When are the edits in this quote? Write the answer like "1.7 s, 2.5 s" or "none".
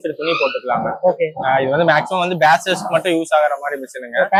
none